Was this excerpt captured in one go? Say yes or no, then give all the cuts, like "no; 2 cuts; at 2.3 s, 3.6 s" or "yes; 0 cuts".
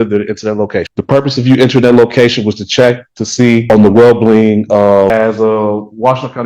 no; 3 cuts; at 0.9 s, 3.6 s, 5.1 s